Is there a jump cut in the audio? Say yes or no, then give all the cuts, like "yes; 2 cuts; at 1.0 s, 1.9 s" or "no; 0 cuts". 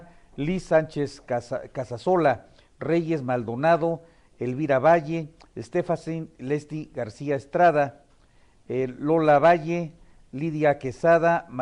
no; 0 cuts